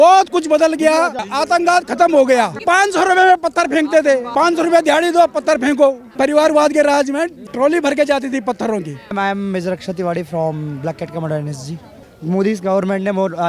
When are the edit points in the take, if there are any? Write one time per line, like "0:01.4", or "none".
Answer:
0:01.3
0:02.6
0:04.3
0:06.1
0:07.5
0:09.1
0:12.1